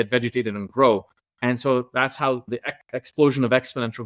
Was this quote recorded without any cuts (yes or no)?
yes